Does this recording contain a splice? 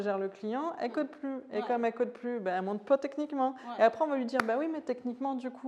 no; 0 cuts

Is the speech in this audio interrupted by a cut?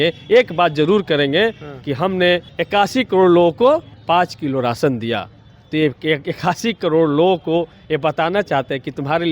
yes; 2 cuts; at 2.5 s, 3.9 s

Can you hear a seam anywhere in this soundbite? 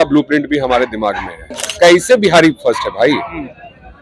yes; 1 cut; at 1.4 s

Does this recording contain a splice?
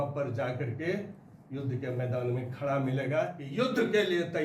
yes; 1 cut; at 3.4 s

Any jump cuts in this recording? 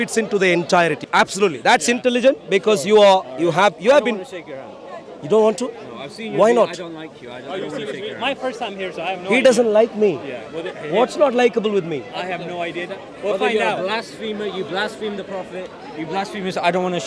yes; 1 cut; at 1.1 s

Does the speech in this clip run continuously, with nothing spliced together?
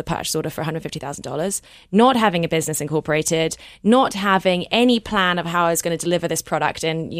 yes; 0 cuts

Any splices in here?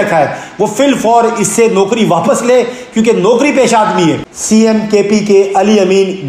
yes; 1 cut; at 4.3 s

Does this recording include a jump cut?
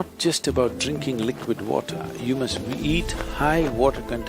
no; 0 cuts

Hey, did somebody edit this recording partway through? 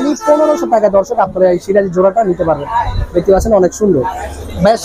no; 0 cuts

